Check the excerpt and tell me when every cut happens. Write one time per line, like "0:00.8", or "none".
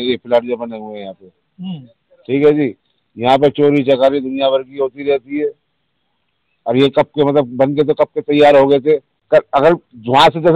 0:09.1